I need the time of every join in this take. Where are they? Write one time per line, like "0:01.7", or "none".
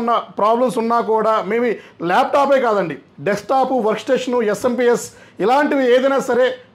none

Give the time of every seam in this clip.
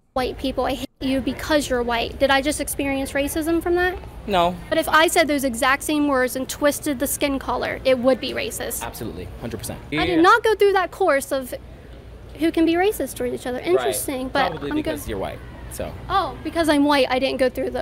0:04.7
0:09.8

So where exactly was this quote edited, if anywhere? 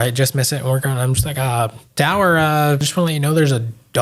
0:01.8
0:02.9

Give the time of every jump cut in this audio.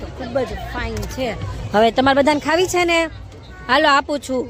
none

